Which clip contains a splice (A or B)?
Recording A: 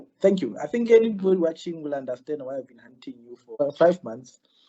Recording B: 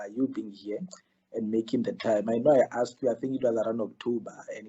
A